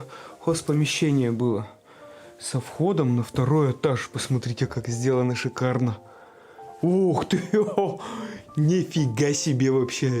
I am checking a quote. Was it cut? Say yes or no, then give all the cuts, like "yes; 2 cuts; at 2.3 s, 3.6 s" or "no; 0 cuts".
yes; 1 cut; at 6.6 s